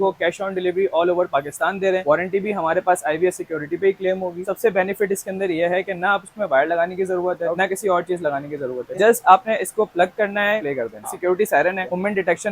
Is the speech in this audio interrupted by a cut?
yes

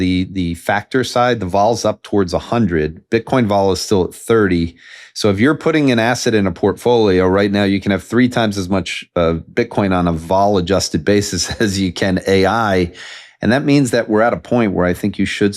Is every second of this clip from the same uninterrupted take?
yes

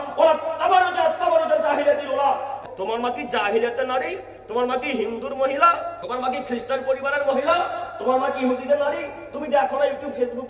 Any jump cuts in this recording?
yes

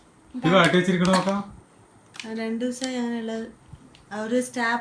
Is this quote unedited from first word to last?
yes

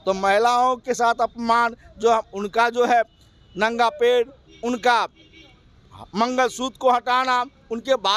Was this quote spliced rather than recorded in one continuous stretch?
no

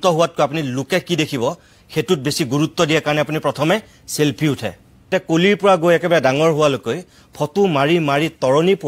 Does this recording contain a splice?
yes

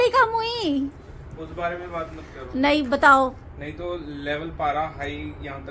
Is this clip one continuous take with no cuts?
yes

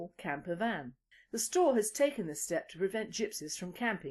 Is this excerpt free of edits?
no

